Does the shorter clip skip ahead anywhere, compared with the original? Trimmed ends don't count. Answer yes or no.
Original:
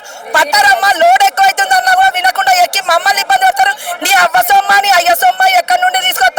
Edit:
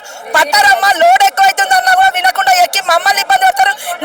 no